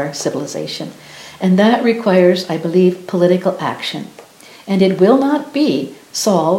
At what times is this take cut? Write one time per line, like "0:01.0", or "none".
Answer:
none